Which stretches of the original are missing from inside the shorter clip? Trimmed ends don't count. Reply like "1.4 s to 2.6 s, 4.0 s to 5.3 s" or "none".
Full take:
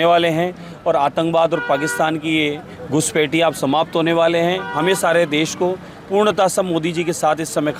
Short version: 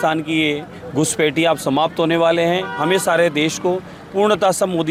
none